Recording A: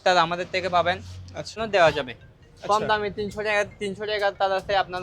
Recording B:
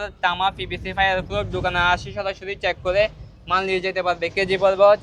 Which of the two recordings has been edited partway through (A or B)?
A